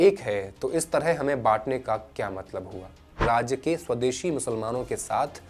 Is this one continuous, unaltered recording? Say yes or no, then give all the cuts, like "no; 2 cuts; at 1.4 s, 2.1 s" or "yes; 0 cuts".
no; 1 cut; at 3.2 s